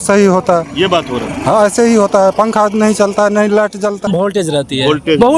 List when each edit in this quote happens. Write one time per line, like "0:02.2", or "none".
0:04.0